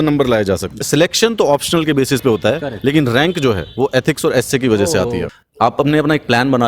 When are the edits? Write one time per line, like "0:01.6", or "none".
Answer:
0:00.8
0:05.4